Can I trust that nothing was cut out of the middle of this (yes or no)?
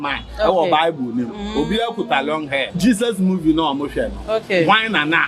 no